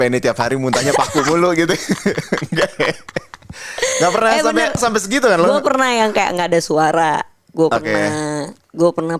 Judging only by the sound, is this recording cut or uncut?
uncut